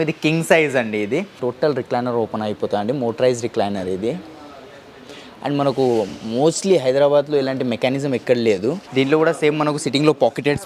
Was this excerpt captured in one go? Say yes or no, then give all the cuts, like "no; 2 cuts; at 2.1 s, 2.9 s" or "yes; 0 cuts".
no; 2 cuts; at 1.3 s, 8.8 s